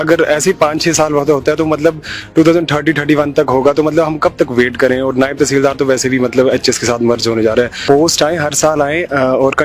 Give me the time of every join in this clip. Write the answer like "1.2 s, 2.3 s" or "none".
7.8 s